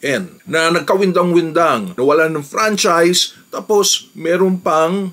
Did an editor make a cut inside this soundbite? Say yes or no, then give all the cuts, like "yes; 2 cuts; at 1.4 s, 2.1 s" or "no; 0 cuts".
no; 0 cuts